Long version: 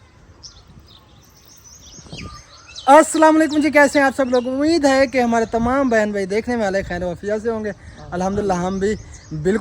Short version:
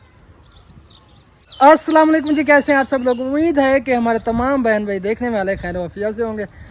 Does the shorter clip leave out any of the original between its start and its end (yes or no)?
yes